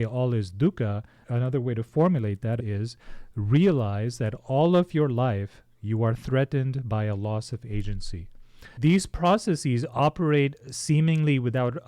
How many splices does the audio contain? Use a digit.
3